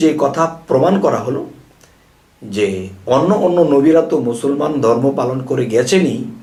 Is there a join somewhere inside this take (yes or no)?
no